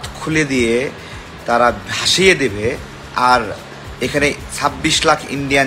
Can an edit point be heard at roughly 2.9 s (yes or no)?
yes